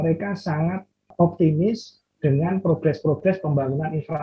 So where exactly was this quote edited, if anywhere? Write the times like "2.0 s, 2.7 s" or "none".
1.1 s